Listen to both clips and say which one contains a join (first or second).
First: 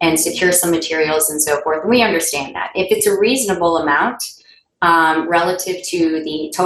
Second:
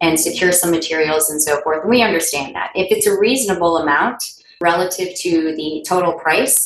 second